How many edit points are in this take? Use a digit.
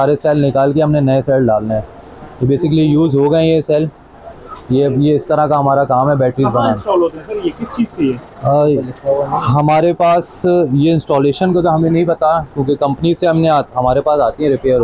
0